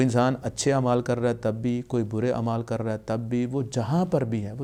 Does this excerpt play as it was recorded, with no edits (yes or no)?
yes